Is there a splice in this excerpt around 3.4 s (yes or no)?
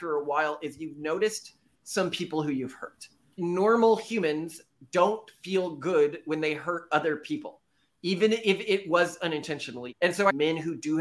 yes